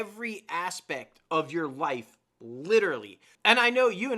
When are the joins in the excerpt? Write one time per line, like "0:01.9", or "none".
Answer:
0:03.2